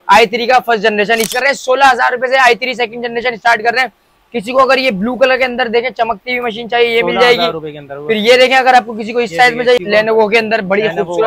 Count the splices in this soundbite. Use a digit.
2